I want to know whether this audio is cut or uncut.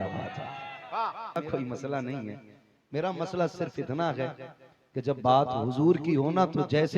cut